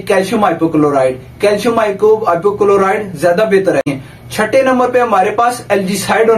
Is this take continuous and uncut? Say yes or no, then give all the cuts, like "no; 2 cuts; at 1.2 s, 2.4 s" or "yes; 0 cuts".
no; 1 cut; at 4.0 s